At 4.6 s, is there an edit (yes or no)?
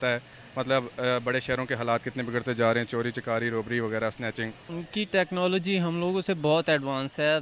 yes